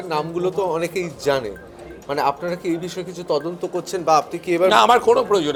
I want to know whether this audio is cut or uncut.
uncut